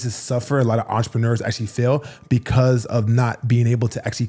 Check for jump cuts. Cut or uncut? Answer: uncut